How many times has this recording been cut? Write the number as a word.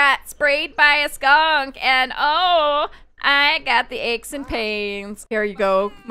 one